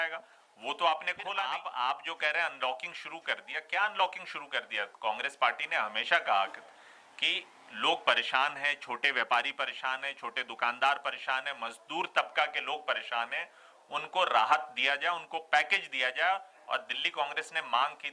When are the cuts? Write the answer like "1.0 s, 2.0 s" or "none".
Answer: 1.6 s

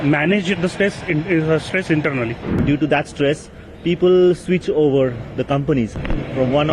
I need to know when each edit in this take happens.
2.6 s

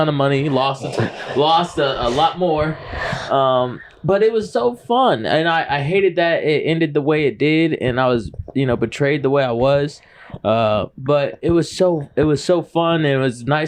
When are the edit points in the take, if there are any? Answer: none

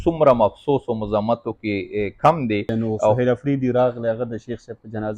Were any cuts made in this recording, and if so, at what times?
3.2 s

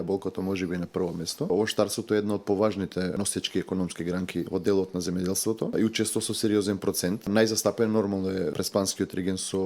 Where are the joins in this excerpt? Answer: 1.5 s, 3.2 s, 4.5 s, 5.7 s, 7.3 s, 8.5 s

